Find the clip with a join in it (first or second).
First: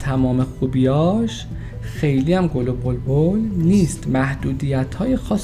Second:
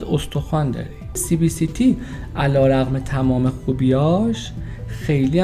second